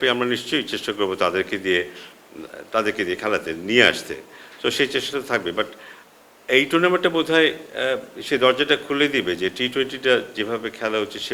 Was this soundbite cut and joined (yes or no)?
no